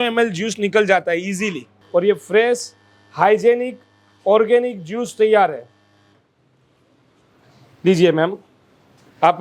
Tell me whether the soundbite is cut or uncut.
cut